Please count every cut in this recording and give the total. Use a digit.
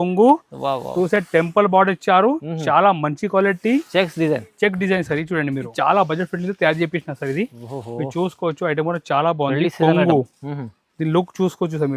1